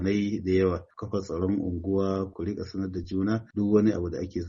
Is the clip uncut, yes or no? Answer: no